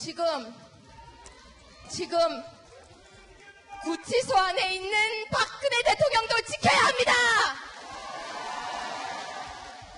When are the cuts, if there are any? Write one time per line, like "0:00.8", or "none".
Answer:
none